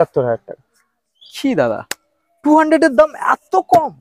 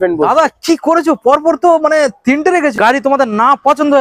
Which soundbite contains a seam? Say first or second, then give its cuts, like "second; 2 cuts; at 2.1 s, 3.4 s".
second; 1 cut; at 2.7 s